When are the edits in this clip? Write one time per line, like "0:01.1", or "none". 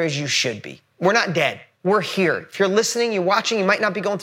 0:01.7